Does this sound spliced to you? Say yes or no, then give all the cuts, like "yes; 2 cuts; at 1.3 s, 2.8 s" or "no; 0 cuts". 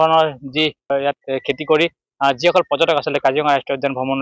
yes; 1 cut; at 0.9 s